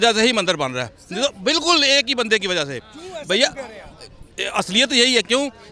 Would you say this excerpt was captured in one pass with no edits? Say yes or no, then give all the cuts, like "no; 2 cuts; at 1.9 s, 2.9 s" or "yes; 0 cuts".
yes; 0 cuts